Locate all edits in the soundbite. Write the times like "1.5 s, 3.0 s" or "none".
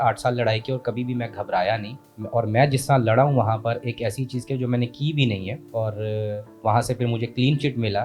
none